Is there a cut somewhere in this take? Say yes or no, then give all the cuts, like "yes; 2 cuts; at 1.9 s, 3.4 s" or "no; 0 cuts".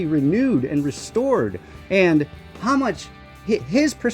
no; 0 cuts